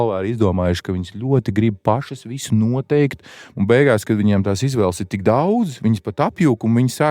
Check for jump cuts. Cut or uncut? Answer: cut